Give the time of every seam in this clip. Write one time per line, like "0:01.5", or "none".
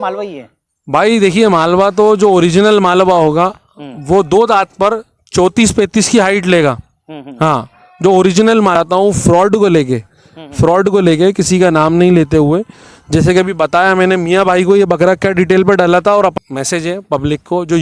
0:08.8
0:16.4